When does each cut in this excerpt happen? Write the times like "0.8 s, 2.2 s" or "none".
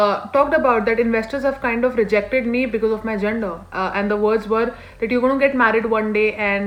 none